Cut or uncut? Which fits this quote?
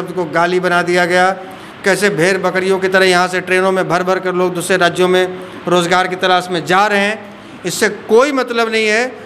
uncut